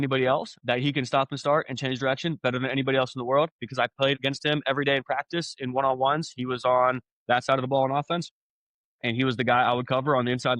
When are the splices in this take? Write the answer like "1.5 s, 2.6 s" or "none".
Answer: 4.2 s